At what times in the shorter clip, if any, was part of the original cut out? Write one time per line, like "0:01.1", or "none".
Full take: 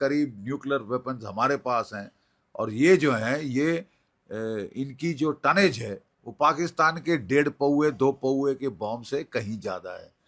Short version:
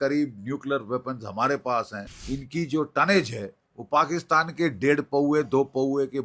0:02.2